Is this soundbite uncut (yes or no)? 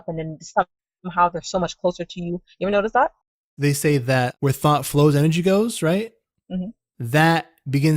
no